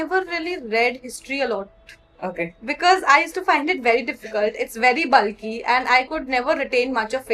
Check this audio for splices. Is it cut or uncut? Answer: uncut